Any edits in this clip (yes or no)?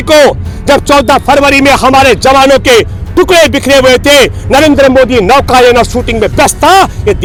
no